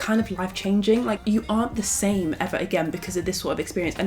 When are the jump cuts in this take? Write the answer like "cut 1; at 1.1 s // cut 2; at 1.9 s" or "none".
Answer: cut 1; at 1.2 s

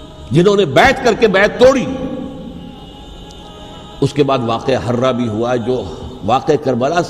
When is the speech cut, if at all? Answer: cut 1; at 2.8 s

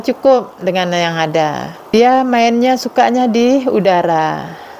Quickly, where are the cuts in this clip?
cut 1; at 1.9 s

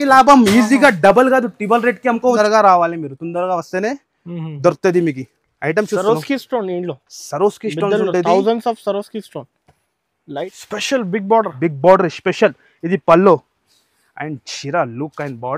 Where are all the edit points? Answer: cut 1; at 2.2 s // cut 2; at 10.4 s

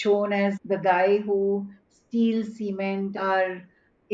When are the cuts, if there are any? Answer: cut 1; at 3.2 s

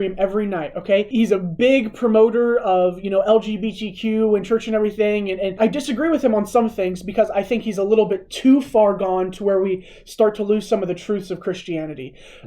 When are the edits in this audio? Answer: cut 1; at 1.1 s // cut 2; at 5.6 s

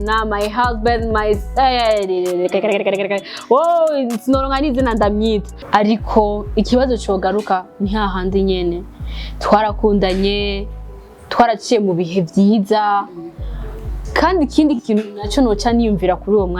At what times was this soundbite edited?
cut 1; at 5.5 s

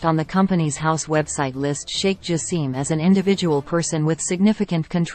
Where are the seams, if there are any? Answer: none

